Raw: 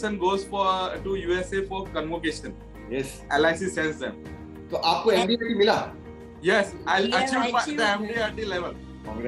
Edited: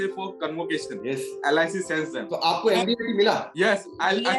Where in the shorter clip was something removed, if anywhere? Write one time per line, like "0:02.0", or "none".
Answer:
0:00.9
0:02.2
0:03.5